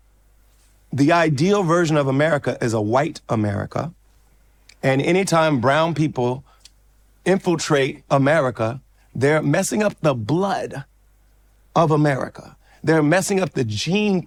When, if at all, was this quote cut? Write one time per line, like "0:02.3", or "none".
none